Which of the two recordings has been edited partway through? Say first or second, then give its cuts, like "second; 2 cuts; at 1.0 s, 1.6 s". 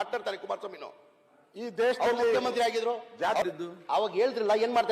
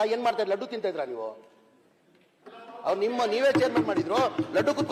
first; 1 cut; at 3.4 s